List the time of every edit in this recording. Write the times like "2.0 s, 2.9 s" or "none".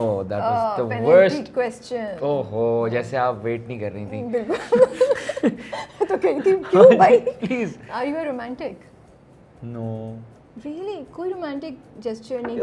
none